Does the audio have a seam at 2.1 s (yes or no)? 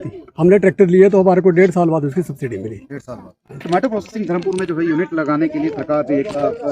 no